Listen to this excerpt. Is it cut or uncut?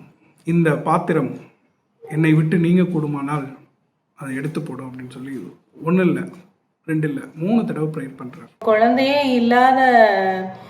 cut